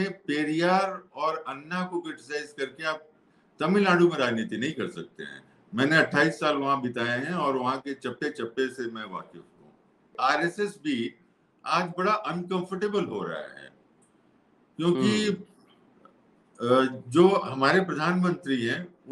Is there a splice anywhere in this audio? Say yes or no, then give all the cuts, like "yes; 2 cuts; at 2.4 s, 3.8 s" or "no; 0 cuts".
yes; 1 cut; at 10.1 s